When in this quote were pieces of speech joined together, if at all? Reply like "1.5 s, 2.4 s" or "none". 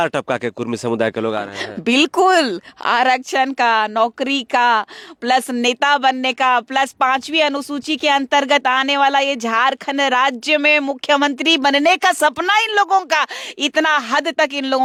none